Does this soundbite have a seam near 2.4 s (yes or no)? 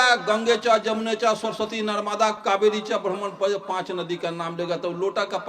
yes